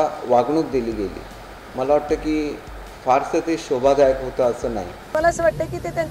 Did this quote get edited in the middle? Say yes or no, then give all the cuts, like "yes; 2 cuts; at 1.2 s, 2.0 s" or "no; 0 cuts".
yes; 1 cut; at 5.1 s